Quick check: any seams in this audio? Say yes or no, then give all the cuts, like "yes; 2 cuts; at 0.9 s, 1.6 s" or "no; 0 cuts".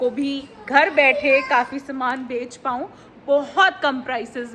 no; 0 cuts